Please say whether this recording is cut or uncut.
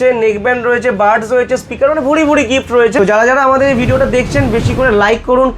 cut